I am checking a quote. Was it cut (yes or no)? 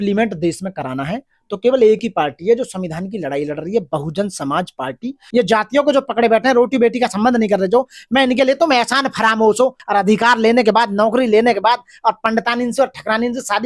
yes